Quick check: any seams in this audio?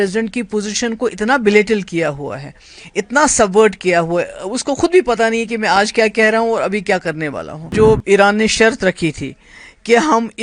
yes; 1 cut; at 7.7 s

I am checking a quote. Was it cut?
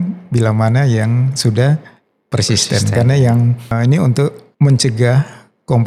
no; 0 cuts

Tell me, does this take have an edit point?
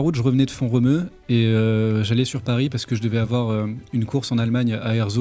no; 0 cuts

